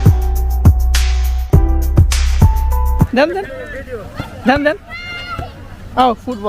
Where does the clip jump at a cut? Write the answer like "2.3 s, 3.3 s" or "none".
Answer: 0.9 s, 2.1 s, 3.1 s